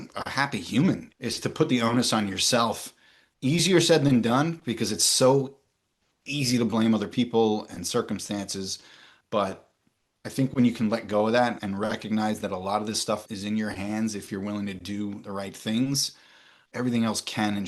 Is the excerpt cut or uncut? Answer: uncut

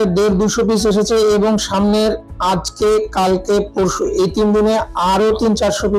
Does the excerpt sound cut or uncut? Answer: uncut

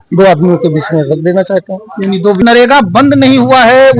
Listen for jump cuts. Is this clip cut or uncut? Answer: cut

